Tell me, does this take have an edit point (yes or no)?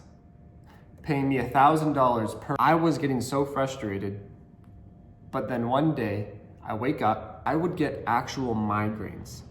yes